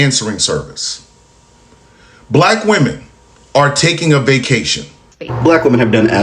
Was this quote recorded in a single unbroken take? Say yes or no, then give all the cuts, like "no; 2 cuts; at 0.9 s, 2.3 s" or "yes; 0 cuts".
no; 1 cut; at 5.3 s